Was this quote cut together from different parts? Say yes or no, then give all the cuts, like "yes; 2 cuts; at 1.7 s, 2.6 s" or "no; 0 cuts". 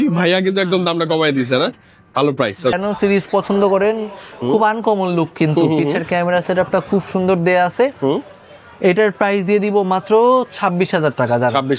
no; 0 cuts